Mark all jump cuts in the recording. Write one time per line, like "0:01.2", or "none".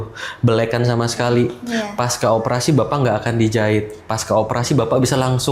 none